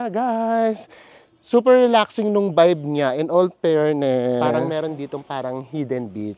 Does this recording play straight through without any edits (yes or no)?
no